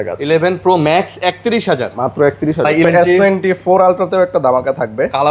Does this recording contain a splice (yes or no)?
yes